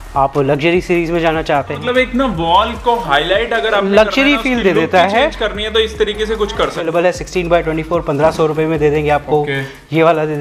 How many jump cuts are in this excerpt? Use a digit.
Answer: 2